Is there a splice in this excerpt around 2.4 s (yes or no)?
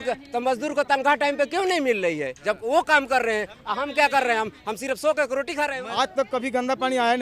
no